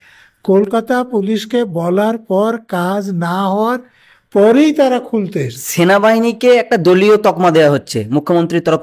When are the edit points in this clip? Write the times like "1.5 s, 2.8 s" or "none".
5.6 s